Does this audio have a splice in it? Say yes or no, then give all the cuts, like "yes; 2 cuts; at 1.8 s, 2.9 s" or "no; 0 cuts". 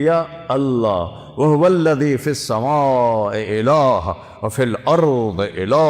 no; 0 cuts